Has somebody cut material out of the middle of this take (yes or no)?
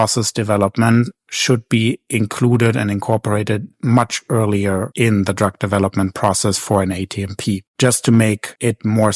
yes